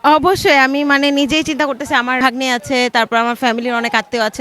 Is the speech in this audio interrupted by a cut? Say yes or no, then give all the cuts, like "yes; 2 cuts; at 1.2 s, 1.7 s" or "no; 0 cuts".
yes; 1 cut; at 2.2 s